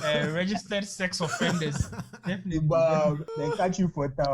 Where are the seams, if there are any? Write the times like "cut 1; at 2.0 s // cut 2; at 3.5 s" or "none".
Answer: cut 1; at 3.2 s

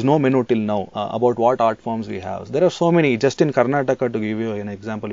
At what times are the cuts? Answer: cut 1; at 1.0 s

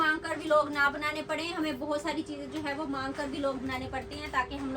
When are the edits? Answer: none

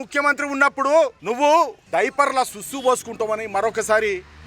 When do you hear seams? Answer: cut 1; at 1.2 s // cut 2; at 1.8 s

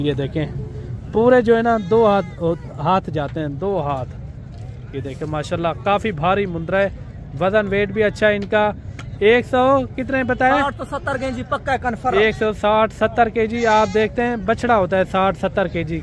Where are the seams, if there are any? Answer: none

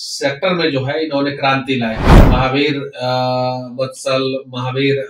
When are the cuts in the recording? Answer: cut 1; at 2.1 s

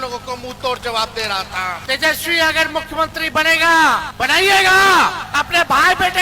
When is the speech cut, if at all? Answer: cut 1; at 1.8 s // cut 2; at 4.1 s // cut 3; at 5.2 s

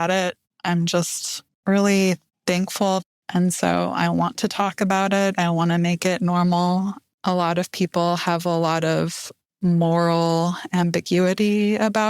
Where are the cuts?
cut 1; at 3.0 s // cut 2; at 7.0 s

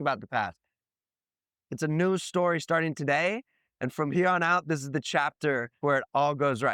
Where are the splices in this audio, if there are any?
cut 1; at 5.8 s

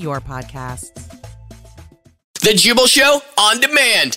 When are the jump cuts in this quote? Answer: cut 1; at 2.3 s

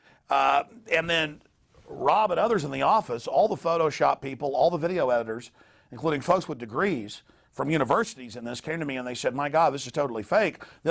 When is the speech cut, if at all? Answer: cut 1; at 1.4 s

